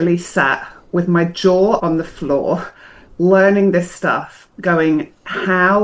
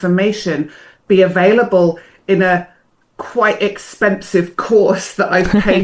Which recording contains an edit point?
first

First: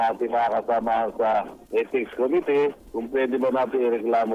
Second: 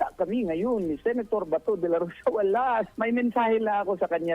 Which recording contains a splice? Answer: second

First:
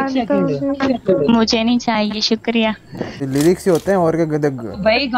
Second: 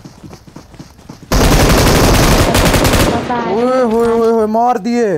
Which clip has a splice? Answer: first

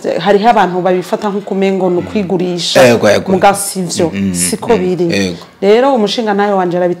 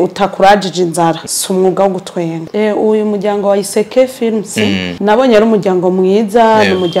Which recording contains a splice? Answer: second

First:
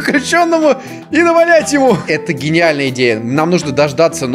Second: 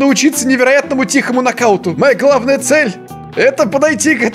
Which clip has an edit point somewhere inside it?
first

